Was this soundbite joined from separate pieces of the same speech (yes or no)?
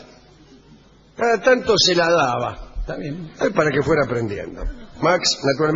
yes